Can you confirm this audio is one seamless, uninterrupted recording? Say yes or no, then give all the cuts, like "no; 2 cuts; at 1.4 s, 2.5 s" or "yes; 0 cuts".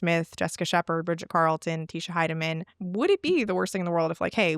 no; 1 cut; at 2.7 s